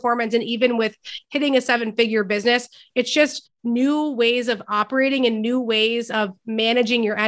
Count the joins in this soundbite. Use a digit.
0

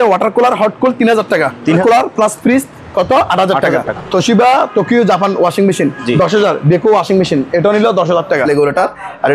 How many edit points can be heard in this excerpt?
3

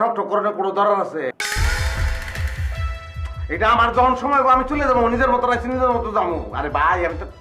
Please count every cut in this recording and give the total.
1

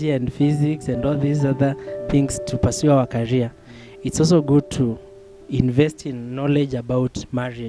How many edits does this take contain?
0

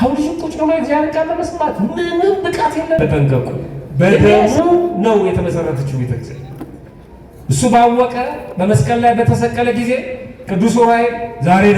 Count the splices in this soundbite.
1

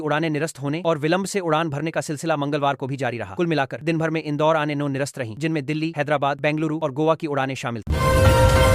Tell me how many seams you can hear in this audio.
1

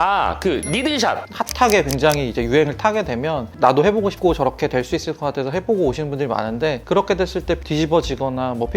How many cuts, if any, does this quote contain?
1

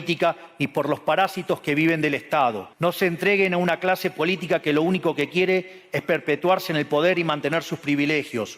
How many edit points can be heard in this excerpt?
1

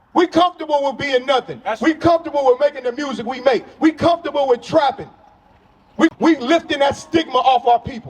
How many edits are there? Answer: 1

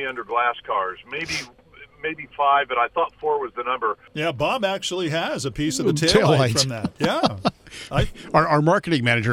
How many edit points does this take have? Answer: 1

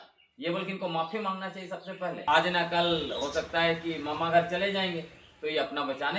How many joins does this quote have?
1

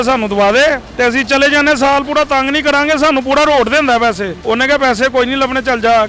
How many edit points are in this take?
1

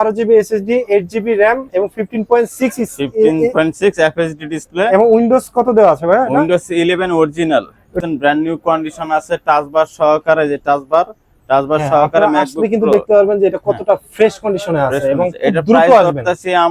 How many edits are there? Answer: 1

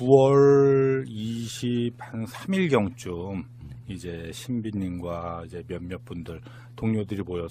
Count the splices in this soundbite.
1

